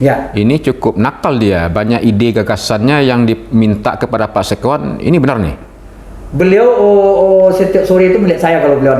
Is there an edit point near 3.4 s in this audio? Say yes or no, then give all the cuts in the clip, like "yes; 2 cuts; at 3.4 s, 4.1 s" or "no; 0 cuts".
no; 0 cuts